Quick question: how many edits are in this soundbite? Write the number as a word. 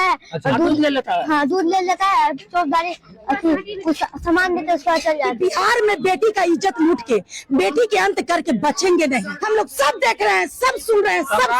two